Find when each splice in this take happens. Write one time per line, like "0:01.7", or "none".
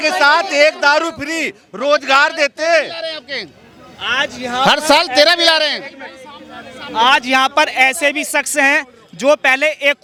none